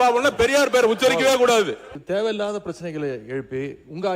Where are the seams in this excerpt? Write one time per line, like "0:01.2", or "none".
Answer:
0:01.9